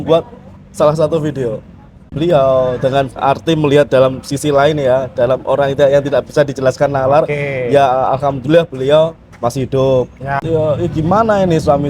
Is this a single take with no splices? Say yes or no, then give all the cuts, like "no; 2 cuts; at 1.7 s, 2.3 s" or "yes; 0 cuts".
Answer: no; 2 cuts; at 2.1 s, 10.4 s